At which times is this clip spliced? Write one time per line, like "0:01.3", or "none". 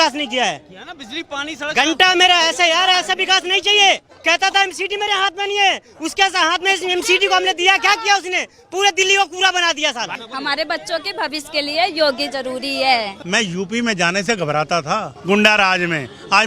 0:04.1
0:10.2
0:13.2
0:15.1